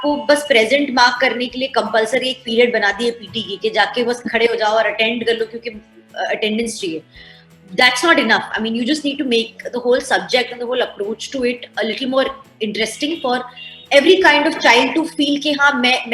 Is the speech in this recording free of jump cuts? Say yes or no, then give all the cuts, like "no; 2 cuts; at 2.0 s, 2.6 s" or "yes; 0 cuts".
yes; 0 cuts